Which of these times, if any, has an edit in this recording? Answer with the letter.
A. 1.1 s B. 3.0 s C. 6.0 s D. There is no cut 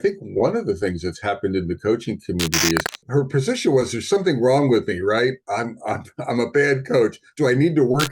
B